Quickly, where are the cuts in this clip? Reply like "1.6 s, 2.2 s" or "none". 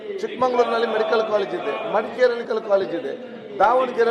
2.4 s